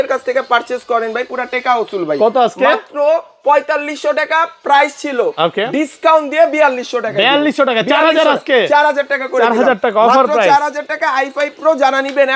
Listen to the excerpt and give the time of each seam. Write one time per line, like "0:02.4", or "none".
none